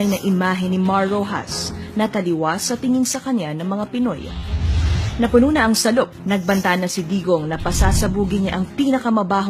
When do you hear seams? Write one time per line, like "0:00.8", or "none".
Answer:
0:07.4